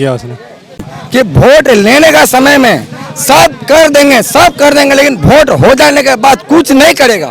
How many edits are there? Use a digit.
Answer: 1